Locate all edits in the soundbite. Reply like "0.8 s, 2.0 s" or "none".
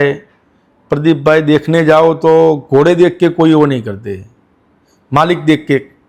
none